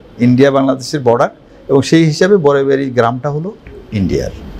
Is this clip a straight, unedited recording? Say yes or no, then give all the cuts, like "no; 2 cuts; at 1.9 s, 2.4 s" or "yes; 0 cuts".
yes; 0 cuts